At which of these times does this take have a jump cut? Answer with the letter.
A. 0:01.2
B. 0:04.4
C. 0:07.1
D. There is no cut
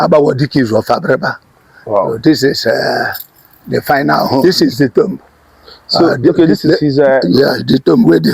B